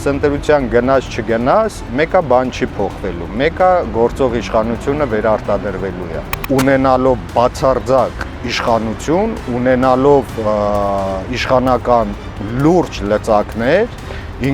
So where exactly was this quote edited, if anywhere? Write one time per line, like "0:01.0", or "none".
0:06.4